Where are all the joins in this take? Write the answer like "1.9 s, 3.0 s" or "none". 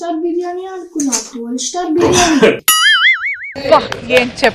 none